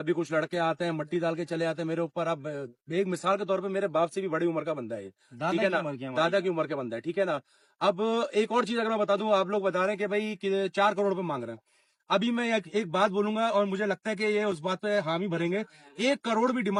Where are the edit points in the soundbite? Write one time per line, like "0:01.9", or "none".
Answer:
none